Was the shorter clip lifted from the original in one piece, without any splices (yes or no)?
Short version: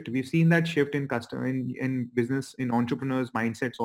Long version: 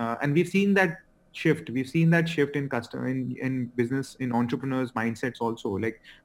yes